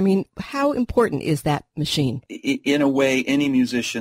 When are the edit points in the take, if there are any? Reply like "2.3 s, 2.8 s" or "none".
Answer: 1.7 s